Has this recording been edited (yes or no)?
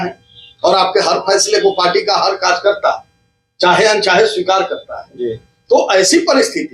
no